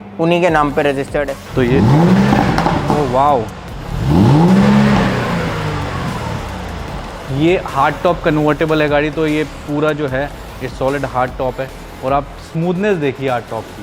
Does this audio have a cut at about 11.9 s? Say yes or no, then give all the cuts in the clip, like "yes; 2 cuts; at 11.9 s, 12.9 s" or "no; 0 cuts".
no; 2 cuts; at 1.4 s, 7.2 s